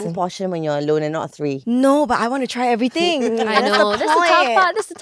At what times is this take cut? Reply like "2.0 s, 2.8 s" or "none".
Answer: none